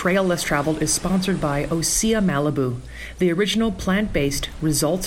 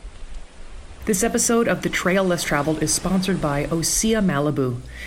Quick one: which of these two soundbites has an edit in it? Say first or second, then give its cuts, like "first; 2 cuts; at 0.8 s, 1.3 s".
second; 1 cut; at 1.1 s